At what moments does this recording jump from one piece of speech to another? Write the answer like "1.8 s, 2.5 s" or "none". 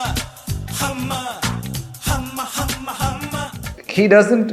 3.6 s